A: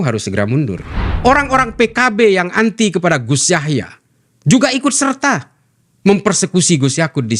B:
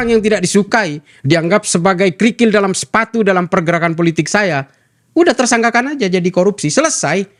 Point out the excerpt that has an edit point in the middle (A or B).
A